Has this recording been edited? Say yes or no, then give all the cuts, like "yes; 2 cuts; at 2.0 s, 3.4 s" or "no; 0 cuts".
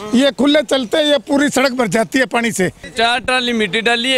yes; 1 cut; at 2.9 s